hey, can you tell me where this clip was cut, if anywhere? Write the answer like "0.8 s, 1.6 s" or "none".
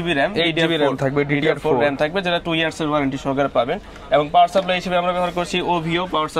none